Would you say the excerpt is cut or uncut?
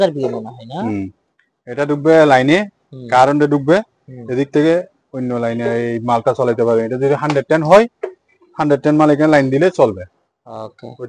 uncut